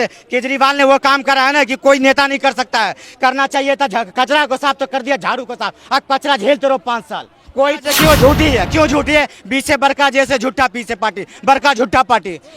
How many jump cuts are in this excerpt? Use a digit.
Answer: 1